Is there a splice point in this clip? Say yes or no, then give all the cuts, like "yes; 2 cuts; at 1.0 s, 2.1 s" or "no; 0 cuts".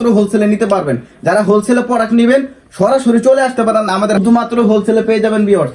yes; 1 cut; at 4.2 s